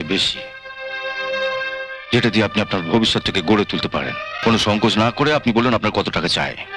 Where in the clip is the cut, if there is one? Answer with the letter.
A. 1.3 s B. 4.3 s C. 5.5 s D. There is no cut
B